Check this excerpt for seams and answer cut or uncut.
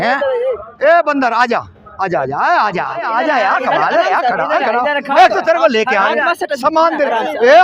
cut